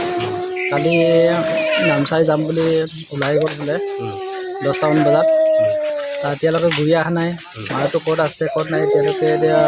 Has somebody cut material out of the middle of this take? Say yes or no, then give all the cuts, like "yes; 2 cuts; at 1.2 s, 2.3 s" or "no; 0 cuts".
no; 0 cuts